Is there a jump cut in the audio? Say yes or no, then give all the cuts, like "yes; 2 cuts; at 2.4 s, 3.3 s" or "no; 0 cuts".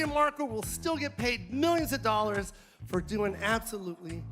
no; 0 cuts